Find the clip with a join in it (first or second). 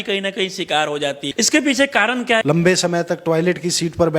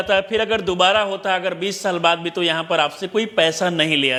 first